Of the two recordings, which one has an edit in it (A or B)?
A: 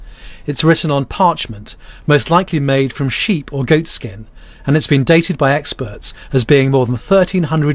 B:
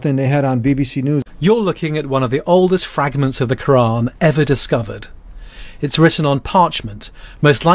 B